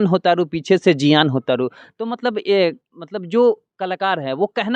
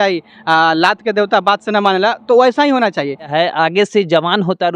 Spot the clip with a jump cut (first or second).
second